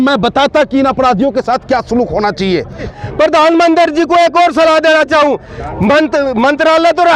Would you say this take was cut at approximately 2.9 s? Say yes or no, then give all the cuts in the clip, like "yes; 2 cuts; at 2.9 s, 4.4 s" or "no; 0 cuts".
yes; 1 cut; at 2.9 s